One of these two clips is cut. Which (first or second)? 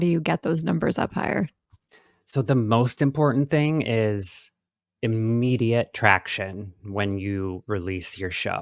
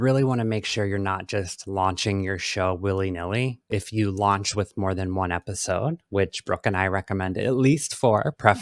second